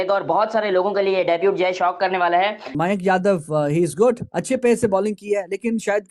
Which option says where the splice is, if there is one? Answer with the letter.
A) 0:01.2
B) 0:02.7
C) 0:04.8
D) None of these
B